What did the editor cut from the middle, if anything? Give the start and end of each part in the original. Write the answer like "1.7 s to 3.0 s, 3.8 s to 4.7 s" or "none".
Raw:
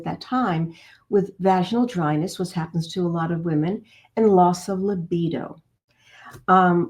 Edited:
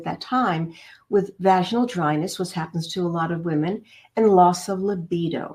none